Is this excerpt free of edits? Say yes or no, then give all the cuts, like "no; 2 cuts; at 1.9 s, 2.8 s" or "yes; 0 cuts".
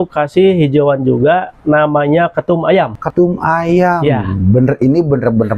no; 1 cut; at 3.0 s